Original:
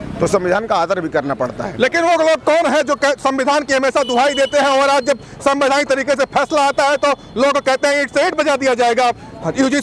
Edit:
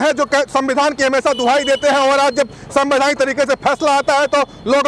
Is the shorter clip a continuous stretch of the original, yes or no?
yes